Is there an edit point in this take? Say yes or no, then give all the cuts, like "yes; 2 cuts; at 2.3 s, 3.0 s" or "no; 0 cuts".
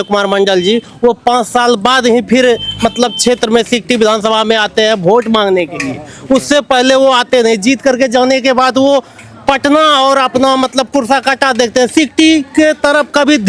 no; 0 cuts